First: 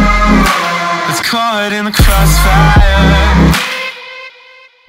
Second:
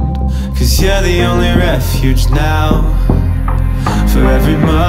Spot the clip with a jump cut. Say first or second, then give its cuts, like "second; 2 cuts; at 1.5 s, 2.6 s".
first; 1 cut; at 1.0 s